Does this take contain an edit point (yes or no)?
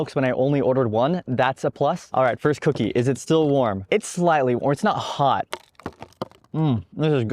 yes